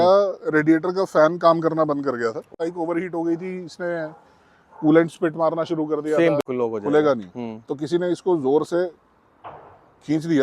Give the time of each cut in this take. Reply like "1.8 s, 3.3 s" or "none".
2.6 s, 6.4 s